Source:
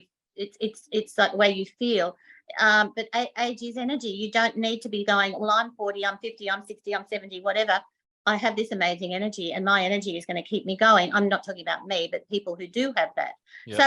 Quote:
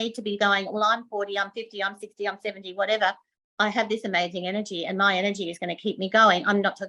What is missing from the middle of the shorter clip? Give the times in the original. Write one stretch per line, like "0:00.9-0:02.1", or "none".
none

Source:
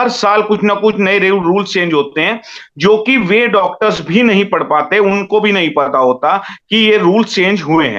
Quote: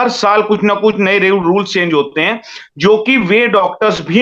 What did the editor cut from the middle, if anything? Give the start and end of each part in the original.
none

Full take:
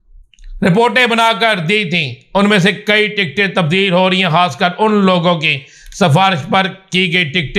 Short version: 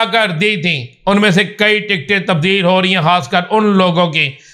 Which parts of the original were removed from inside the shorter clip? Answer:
none

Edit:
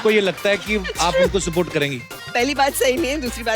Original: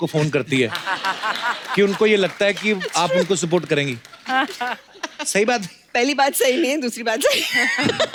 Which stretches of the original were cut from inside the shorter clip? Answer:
0:04.1-0:05.8

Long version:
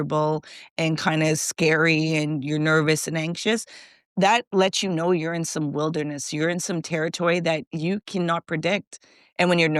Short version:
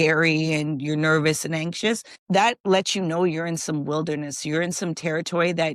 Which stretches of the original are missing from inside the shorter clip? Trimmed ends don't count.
0:03.7-0:04.0

